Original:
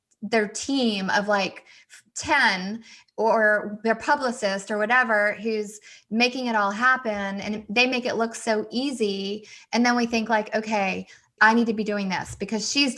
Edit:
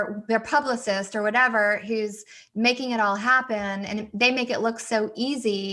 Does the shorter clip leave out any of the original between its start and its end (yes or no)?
no